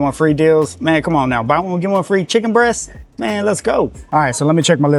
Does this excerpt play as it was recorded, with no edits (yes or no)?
yes